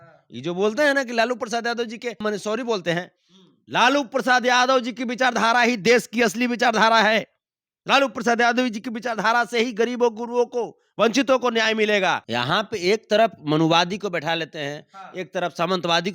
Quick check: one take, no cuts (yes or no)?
no